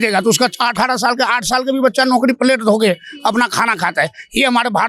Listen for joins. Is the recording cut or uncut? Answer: uncut